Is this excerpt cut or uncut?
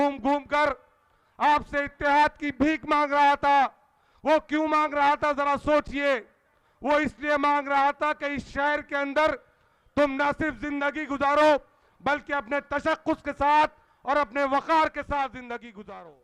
uncut